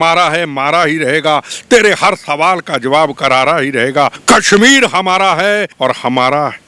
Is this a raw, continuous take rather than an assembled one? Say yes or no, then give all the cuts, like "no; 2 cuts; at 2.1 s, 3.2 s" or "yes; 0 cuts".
no; 2 cuts; at 4.2 s, 5.7 s